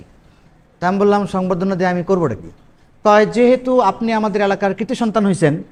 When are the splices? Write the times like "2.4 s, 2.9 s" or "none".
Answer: none